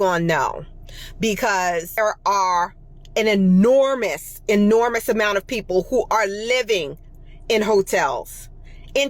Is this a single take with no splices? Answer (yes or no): no